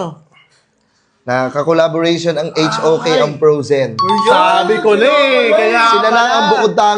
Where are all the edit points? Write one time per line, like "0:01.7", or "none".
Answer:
none